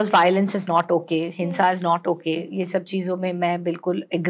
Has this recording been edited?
no; 0 cuts

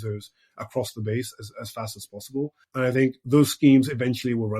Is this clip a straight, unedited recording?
no; 1 cut; at 2.6 s

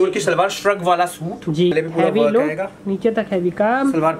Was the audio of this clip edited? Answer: yes; 1 cut; at 1.7 s

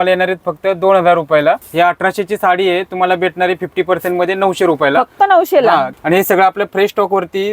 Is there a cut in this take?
yes; 2 cuts; at 1.6 s, 5.9 s

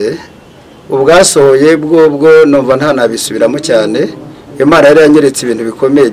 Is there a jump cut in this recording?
no; 0 cuts

